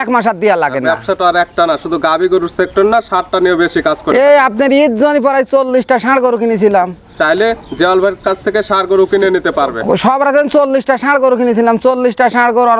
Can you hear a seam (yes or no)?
no